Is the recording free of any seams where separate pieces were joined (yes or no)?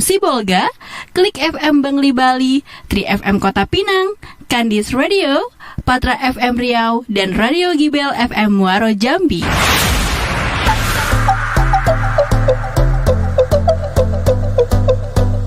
no